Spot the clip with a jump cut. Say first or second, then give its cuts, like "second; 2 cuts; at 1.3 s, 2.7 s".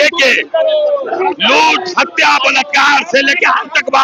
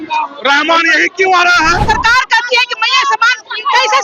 second; 1 cut; at 1.8 s